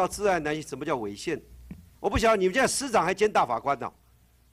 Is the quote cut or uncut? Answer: uncut